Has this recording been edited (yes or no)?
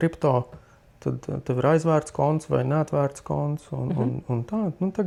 no